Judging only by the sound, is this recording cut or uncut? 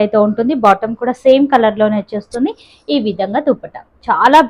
uncut